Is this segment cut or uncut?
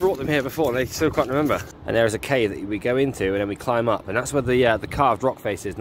cut